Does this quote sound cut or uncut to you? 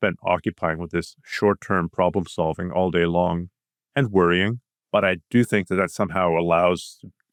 uncut